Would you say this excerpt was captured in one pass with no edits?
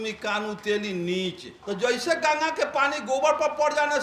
no; 1 cut; at 1.5 s

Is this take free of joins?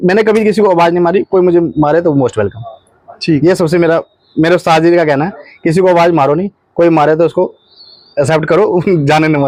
yes; 0 cuts

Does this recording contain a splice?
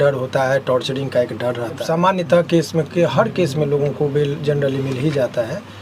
yes; 1 cut; at 1.8 s

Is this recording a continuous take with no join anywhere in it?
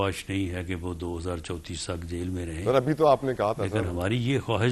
yes; 0 cuts

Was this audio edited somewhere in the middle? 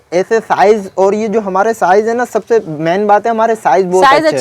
no; 0 cuts

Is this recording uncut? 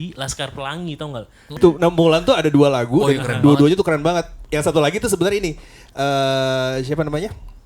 no; 1 cut; at 1.6 s

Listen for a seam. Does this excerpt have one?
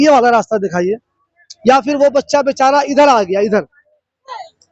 no; 0 cuts

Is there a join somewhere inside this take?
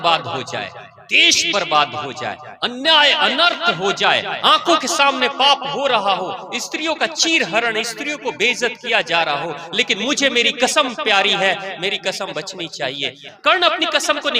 yes; 1 cut; at 13.3 s

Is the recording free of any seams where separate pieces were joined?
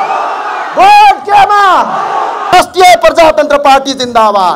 no; 1 cut; at 2.5 s

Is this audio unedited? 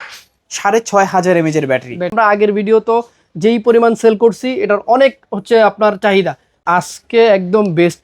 no; 2 cuts; at 2.1 s, 6.5 s

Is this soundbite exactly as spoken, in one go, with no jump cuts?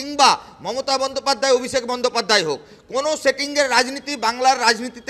yes; 0 cuts

